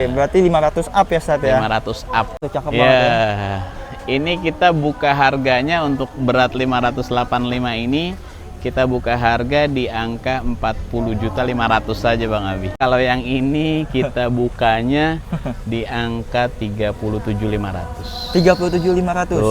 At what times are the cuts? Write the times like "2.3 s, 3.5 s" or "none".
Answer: 2.4 s, 12.8 s